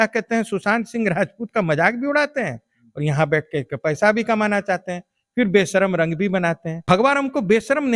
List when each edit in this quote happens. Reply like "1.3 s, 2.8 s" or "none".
6.7 s